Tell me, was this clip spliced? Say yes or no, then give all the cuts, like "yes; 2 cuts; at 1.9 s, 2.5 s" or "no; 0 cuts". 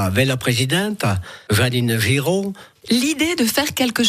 yes; 1 cut; at 2.7 s